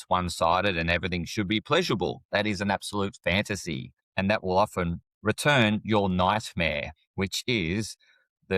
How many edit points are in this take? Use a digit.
2